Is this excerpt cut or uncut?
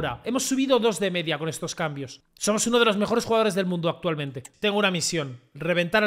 cut